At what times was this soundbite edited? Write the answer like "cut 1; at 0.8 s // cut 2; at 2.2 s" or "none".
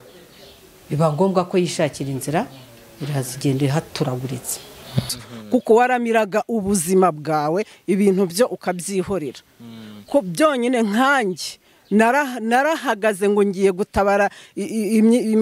cut 1; at 5.1 s